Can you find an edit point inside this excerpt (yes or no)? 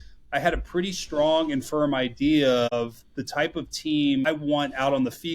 yes